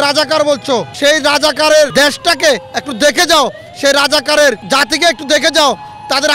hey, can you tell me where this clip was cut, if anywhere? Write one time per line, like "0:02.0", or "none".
0:00.9
0:01.9
0:04.6